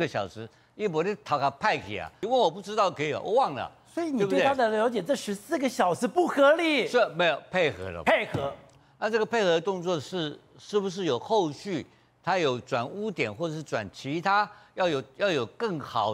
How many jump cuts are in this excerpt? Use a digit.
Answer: 2